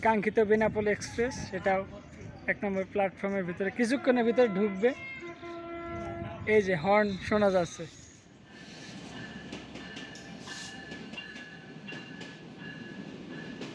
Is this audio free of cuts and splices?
yes; 0 cuts

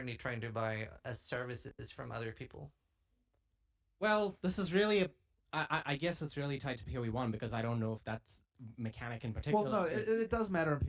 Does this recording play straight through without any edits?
yes; 0 cuts

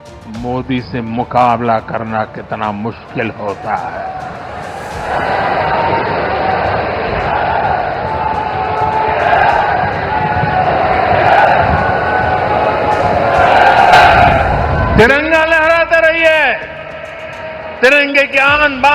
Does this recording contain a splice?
no; 0 cuts

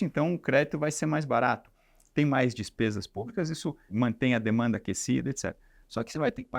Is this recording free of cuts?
no; 1 cut; at 3.8 s

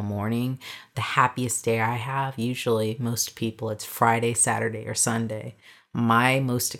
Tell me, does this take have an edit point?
no; 0 cuts

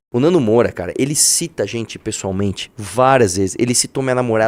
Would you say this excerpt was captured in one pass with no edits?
yes; 0 cuts

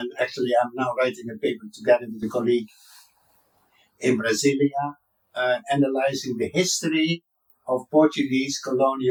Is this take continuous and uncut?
yes; 0 cuts

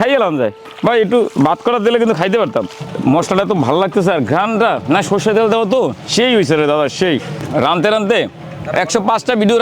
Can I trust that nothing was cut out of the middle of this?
no; 3 cuts; at 2.8 s, 6.0 s, 7.4 s

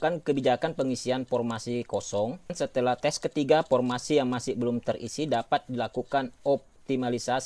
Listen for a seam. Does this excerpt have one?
yes; 1 cut; at 2.5 s

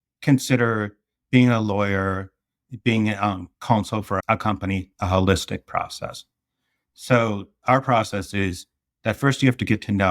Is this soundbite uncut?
no; 1 cut; at 4.2 s

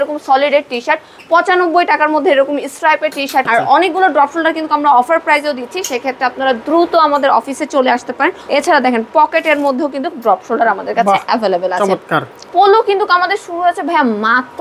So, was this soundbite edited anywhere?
yes; 3 cuts; at 3.5 s, 8.4 s, 12.3 s

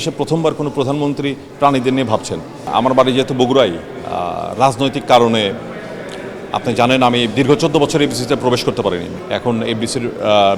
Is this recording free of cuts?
no; 2 cuts; at 2.7 s, 9.1 s

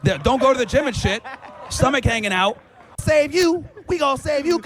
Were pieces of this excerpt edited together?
yes; 1 cut; at 3.0 s

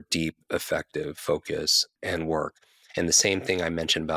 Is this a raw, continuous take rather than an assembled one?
no; 1 cut; at 1.9 s

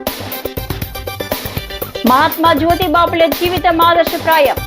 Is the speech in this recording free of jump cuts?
yes; 0 cuts

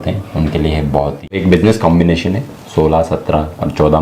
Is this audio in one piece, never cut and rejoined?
no; 1 cut; at 1.4 s

